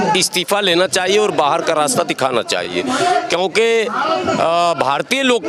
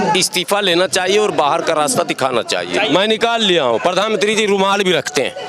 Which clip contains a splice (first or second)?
second